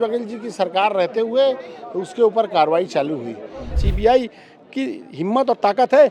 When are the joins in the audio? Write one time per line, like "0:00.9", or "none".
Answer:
0:03.8